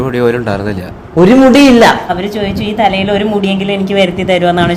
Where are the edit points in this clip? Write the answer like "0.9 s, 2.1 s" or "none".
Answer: 1.8 s